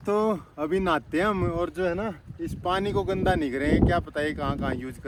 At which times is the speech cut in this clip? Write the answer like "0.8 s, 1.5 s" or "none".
none